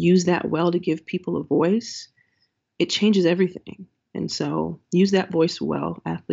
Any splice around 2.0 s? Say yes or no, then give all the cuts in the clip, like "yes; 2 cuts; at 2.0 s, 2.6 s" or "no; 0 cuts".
no; 1 cut; at 4.8 s